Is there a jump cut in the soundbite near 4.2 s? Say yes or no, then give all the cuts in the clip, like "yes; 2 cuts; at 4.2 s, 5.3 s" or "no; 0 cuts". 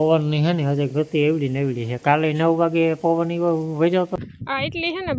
yes; 1 cut; at 4.2 s